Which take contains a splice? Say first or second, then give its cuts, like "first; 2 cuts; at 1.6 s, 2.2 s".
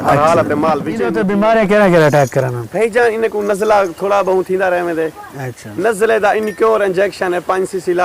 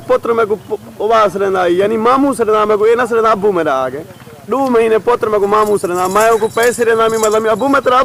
first; 1 cut; at 1.2 s